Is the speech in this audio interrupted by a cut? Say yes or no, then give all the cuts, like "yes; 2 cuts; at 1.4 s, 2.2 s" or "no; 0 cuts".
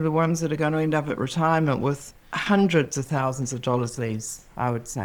no; 0 cuts